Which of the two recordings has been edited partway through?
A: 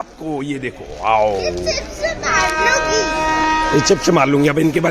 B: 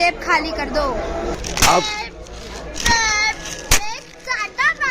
B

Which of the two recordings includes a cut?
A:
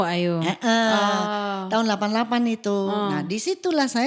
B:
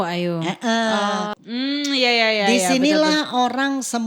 B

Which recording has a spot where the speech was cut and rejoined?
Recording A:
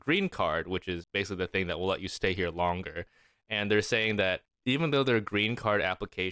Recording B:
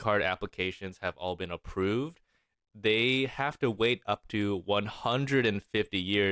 A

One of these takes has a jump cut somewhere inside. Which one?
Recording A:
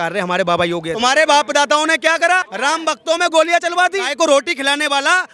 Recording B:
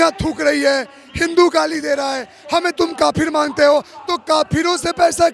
A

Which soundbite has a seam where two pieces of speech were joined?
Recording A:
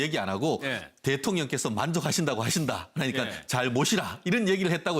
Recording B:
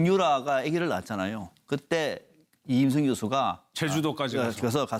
A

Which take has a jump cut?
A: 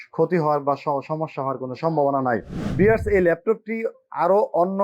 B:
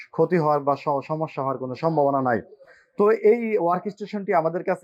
A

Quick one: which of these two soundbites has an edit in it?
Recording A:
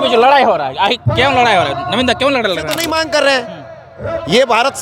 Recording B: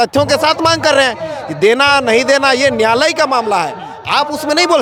A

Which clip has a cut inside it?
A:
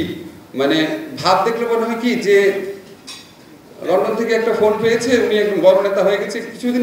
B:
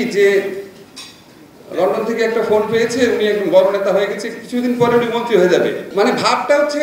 B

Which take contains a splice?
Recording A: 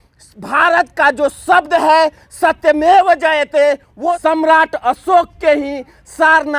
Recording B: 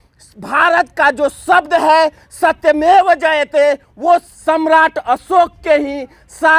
A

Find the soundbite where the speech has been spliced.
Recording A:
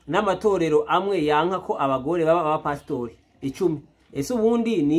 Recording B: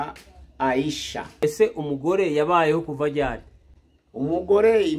B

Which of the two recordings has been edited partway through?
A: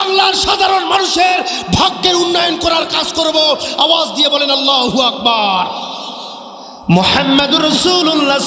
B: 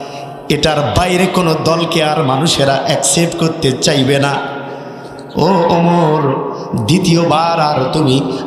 A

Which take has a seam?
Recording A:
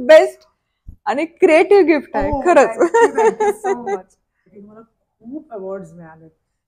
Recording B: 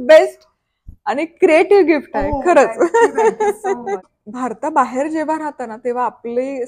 B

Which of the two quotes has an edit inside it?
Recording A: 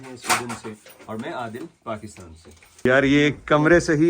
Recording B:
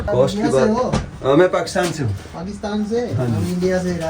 A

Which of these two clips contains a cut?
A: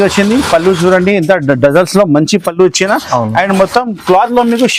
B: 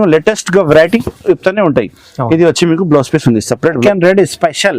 B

